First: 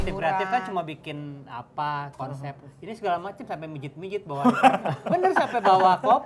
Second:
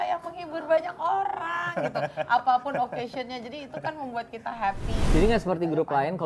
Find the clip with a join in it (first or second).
second